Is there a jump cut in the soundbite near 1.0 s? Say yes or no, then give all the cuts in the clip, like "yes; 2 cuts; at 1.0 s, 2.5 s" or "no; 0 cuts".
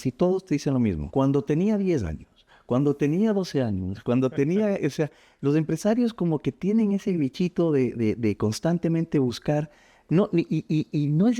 yes; 1 cut; at 1.0 s